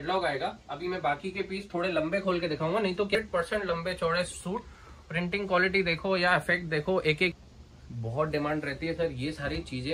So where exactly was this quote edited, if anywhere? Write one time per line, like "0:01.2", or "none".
0:03.2
0:07.4